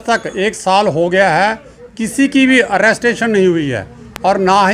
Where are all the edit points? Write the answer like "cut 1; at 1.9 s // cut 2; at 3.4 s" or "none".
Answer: none